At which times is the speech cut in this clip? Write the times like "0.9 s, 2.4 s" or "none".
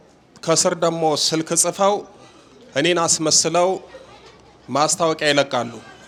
none